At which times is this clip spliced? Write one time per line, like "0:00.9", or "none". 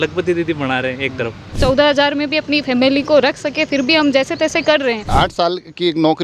0:01.6
0:05.1